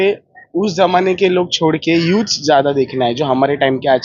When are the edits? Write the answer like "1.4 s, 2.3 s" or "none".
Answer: none